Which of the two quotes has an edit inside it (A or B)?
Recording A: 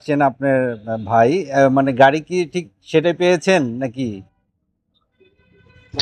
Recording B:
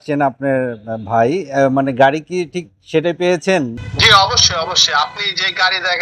B